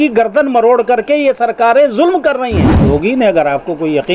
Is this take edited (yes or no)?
yes